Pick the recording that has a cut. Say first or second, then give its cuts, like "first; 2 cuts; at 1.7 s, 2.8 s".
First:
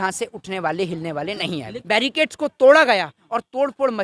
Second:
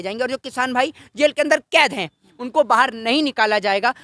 first; 1 cut; at 1.7 s